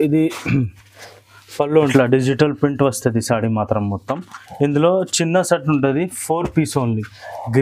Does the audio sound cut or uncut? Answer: cut